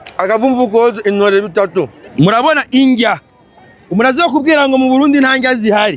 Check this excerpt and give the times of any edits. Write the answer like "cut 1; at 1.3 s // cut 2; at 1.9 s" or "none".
cut 1; at 2.0 s